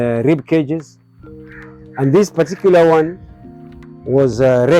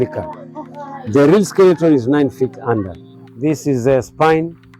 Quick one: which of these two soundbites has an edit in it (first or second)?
second